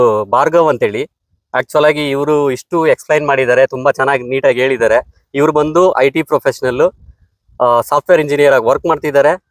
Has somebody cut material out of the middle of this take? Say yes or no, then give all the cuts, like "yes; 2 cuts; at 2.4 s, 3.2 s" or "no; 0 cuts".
no; 0 cuts